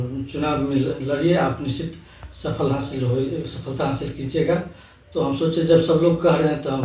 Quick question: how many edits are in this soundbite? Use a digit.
0